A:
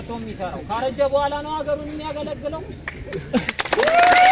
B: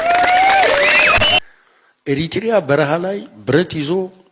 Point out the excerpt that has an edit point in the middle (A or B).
B